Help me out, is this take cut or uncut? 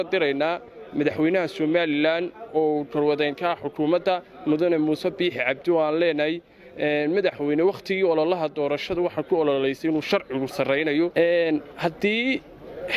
cut